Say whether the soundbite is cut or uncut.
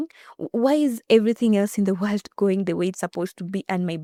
uncut